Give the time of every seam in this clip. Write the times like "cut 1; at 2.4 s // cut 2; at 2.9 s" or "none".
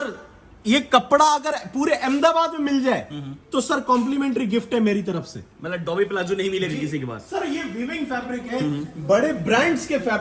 none